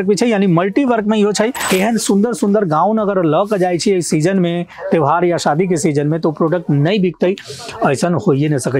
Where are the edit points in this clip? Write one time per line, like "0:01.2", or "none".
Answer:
0:01.7

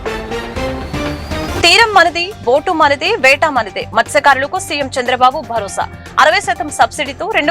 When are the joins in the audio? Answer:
0:01.3

